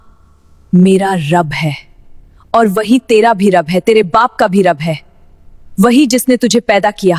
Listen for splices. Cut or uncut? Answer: uncut